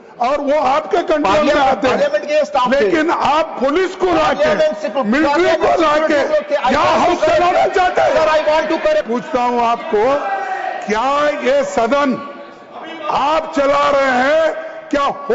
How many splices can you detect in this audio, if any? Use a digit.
1